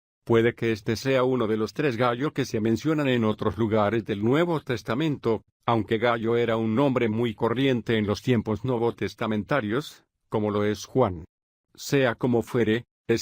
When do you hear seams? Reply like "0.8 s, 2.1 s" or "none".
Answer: 5.8 s